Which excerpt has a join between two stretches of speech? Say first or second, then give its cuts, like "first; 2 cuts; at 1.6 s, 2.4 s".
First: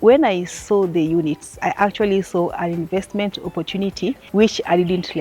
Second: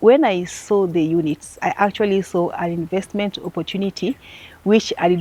first; 1 cut; at 4.2 s